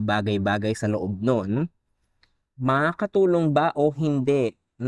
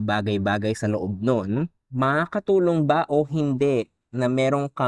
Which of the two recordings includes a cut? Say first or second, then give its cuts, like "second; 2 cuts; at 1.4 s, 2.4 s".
second; 1 cut; at 1.8 s